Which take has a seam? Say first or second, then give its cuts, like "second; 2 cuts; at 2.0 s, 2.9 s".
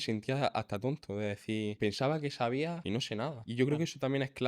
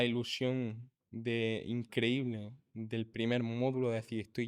first; 2 cuts; at 1.8 s, 3.1 s